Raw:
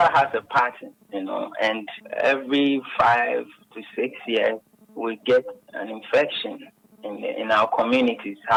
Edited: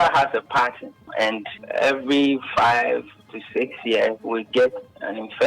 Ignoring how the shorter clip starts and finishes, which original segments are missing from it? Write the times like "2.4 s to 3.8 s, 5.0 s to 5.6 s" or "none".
1.1 s to 1.5 s, 4.6 s to 4.9 s